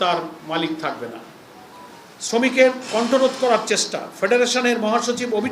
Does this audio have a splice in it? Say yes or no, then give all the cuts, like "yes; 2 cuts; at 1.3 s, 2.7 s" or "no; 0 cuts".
no; 0 cuts